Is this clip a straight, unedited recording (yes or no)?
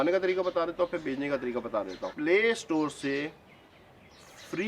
no